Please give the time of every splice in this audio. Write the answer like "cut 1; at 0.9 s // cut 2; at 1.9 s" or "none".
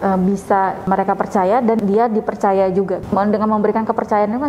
cut 1; at 1.8 s // cut 2; at 3.0 s